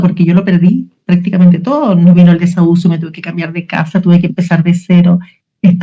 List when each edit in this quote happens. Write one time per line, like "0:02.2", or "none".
none